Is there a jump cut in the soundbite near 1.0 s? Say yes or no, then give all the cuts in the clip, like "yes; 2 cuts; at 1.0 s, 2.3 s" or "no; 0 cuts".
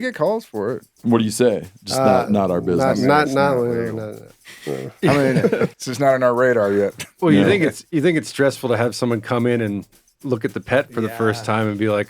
yes; 2 cuts; at 1.0 s, 5.7 s